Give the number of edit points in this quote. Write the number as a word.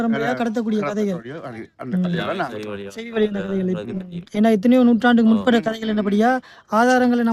zero